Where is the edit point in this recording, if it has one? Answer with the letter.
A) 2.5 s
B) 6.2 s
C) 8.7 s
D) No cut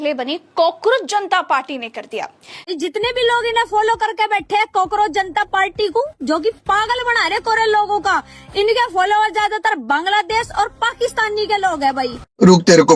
A